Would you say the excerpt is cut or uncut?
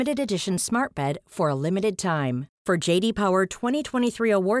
uncut